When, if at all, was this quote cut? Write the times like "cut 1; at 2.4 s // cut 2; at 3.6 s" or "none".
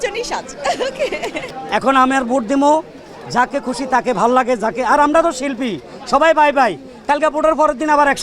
cut 1; at 1.5 s